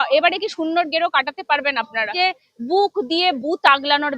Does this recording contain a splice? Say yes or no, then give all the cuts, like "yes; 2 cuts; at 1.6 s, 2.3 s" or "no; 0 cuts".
yes; 1 cut; at 2.1 s